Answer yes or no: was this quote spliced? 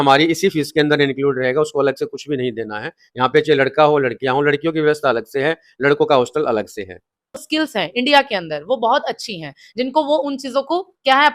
yes